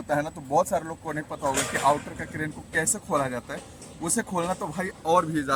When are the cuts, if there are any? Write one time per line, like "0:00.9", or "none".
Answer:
none